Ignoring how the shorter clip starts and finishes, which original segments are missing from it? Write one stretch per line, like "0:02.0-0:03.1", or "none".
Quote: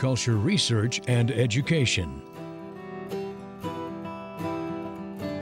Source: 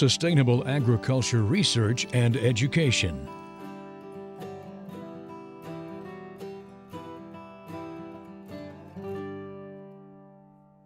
0:03.2-0:05.4

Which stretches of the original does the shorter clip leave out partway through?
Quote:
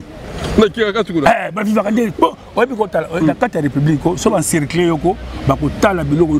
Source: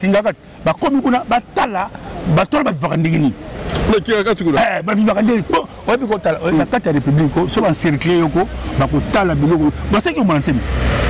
none

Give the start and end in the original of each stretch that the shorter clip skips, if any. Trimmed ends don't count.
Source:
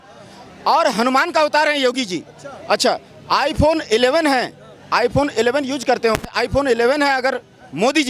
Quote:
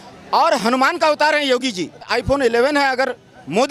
0:02.4-0:06.3

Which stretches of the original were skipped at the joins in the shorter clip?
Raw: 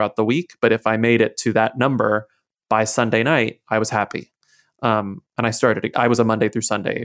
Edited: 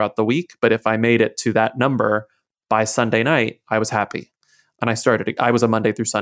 0:04.6-0:05.2

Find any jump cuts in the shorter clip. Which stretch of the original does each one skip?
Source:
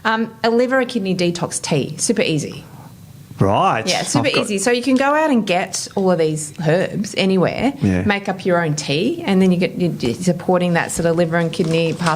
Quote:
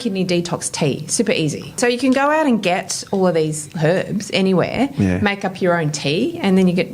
0:02.6-0:04.6

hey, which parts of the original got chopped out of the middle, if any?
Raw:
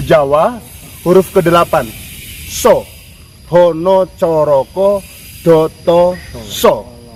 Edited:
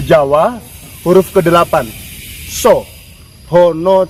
none

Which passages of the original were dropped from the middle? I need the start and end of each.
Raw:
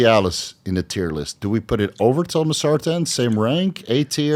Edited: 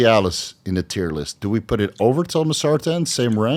none

